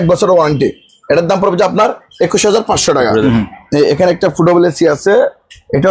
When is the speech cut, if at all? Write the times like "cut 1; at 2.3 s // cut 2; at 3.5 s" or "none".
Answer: cut 1; at 3.2 s